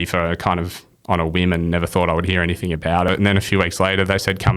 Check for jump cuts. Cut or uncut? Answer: cut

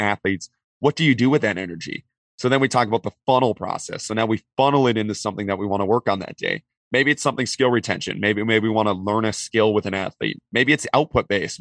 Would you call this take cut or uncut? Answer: cut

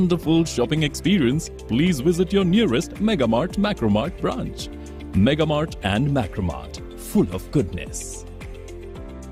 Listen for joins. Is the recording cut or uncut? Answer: uncut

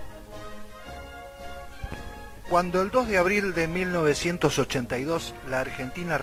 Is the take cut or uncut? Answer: uncut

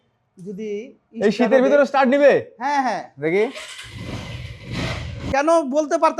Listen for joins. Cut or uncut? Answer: cut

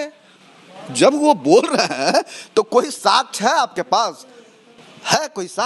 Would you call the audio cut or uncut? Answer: uncut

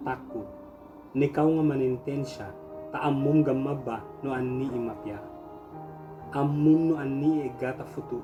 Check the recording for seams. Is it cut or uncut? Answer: uncut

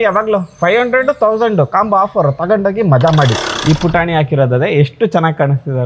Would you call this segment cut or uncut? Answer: cut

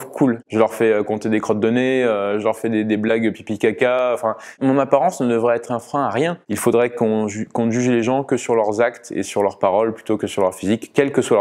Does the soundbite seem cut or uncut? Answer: cut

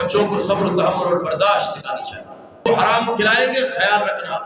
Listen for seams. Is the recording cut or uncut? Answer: cut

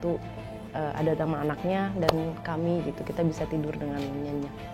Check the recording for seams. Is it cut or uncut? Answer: uncut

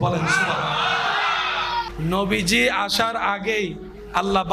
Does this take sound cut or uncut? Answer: cut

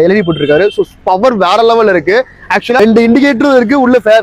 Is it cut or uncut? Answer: cut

